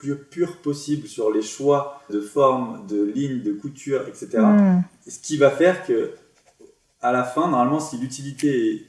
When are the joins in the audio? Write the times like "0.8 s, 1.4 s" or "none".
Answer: 2.2 s